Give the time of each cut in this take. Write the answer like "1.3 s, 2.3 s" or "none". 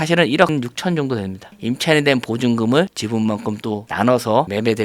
1.5 s

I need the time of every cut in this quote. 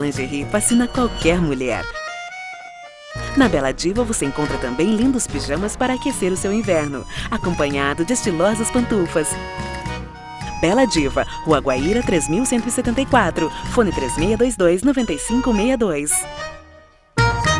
none

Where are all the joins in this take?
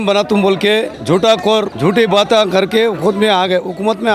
1.0 s, 1.7 s

